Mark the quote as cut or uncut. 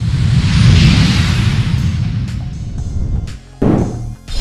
uncut